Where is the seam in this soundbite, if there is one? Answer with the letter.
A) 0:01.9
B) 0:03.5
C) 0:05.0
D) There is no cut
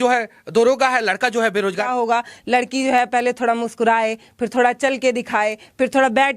A